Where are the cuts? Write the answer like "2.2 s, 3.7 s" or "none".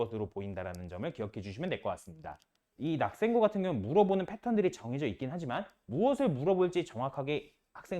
2.7 s